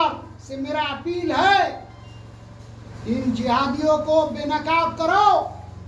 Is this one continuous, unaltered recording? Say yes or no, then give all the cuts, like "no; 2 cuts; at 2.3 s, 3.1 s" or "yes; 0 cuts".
yes; 0 cuts